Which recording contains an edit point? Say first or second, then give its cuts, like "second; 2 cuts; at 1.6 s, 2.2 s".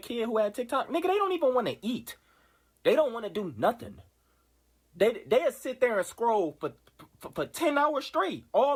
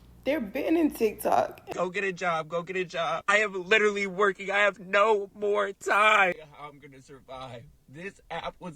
second; 2 cuts; at 1.6 s, 6.4 s